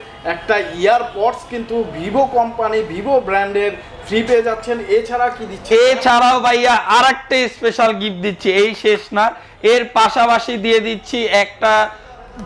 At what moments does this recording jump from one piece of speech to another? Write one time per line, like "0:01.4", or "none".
none